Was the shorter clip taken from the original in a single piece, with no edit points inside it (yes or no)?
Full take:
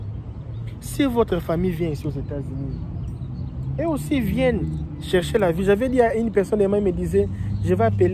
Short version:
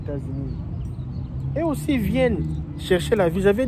yes